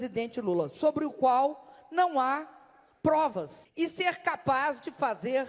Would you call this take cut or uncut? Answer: cut